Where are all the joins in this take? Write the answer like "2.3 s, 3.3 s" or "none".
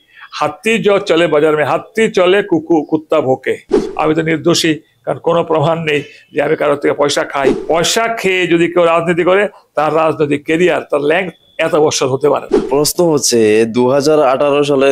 3.8 s, 7.6 s, 12.6 s